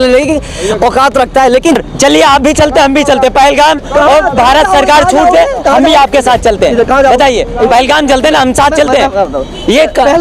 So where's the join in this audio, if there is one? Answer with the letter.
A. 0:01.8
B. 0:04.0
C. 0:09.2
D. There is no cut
A